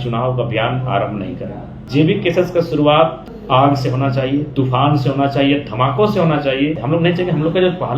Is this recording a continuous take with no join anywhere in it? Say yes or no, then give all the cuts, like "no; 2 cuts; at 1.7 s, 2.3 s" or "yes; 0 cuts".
no; 3 cuts; at 1.7 s, 3.3 s, 6.8 s